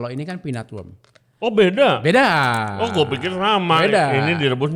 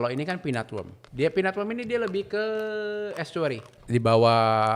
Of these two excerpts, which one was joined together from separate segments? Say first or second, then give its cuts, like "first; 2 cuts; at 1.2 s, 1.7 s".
second; 2 cuts; at 1.0 s, 3.8 s